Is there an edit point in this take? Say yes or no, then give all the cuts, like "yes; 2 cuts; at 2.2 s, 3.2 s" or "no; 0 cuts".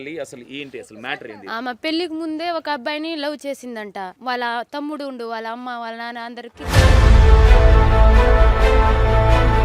yes; 2 cuts; at 4.2 s, 6.7 s